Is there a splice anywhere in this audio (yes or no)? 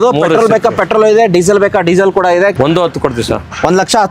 yes